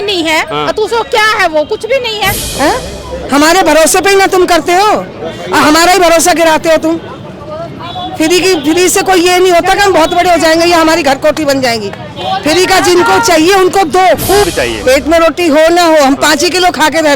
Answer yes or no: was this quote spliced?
yes